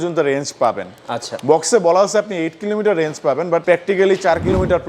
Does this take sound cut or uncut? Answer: cut